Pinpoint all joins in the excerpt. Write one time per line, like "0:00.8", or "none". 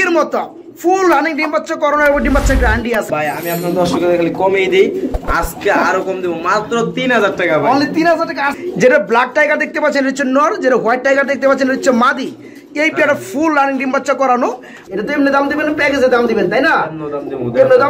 0:03.2
0:08.5
0:14.7